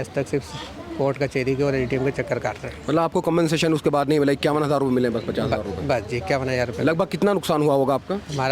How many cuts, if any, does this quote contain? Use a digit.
0